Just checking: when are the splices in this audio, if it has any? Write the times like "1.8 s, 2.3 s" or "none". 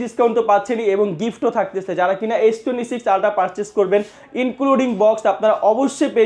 none